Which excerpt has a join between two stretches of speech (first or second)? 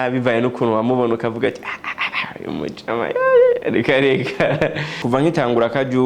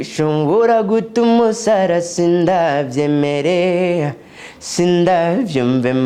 first